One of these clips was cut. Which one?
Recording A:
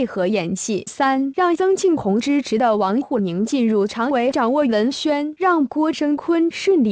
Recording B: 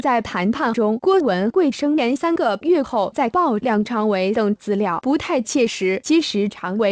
A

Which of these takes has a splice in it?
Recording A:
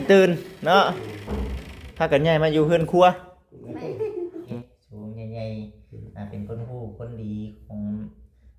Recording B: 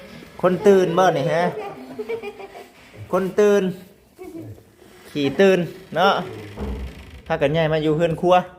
A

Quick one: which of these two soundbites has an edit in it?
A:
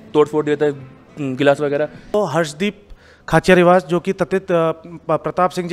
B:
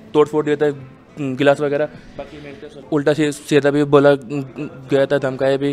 A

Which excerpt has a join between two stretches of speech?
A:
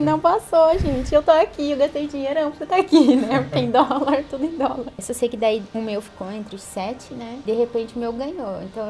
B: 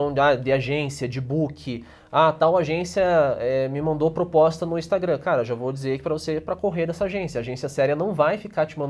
A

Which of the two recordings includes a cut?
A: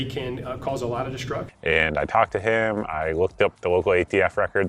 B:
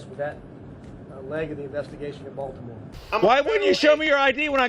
B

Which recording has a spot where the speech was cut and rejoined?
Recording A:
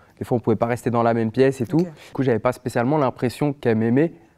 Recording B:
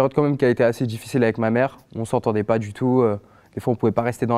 A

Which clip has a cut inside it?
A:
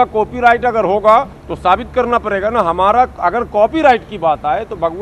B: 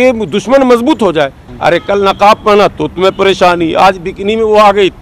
B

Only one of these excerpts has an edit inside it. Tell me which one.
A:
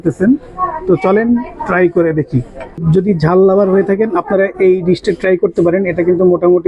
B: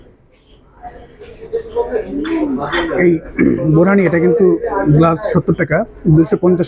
A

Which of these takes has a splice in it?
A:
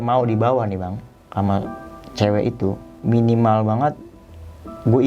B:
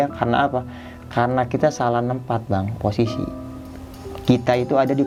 A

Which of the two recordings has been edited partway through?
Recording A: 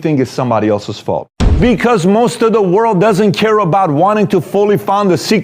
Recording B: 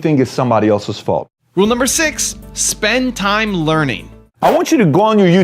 A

